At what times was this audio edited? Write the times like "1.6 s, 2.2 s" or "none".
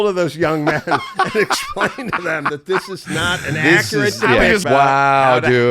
4.6 s